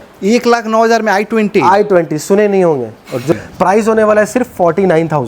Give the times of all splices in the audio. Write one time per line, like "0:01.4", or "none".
0:03.3